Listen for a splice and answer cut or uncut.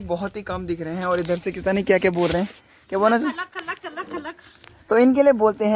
uncut